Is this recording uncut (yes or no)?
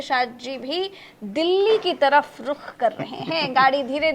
yes